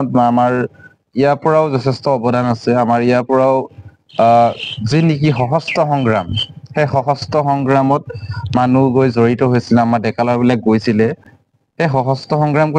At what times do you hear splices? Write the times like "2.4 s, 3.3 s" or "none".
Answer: none